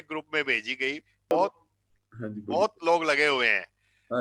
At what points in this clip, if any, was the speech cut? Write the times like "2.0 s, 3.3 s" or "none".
1.3 s